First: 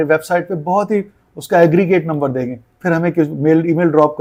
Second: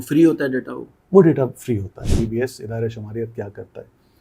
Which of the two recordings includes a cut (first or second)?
second